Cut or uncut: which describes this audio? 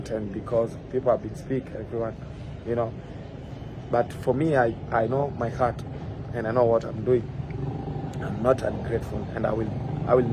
uncut